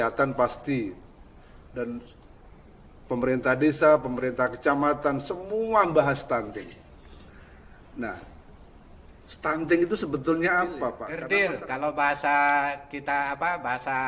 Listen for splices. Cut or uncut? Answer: cut